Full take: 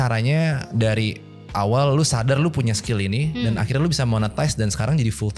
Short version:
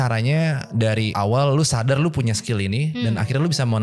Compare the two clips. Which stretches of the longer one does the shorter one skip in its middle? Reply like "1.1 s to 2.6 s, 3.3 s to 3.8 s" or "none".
1.1 s to 1.5 s